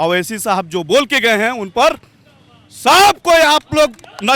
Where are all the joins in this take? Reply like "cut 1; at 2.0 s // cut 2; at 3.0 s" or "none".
none